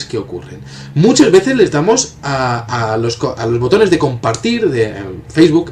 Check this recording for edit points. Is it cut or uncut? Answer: cut